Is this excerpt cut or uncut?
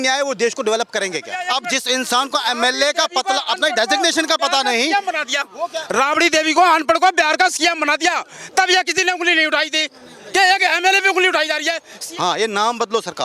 cut